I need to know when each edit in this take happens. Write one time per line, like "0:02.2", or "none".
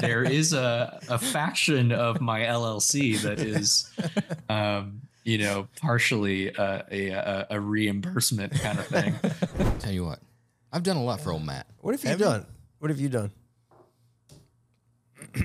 0:09.8